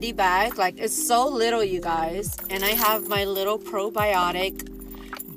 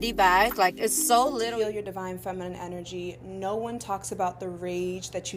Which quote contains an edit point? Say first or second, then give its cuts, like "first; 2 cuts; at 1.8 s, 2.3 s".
second; 1 cut; at 1.5 s